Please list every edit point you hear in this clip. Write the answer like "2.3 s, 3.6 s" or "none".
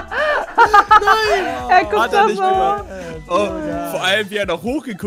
none

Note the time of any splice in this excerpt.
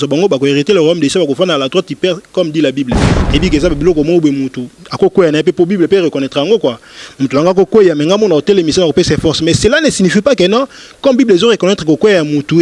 3.1 s

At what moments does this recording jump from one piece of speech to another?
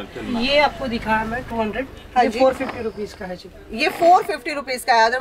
none

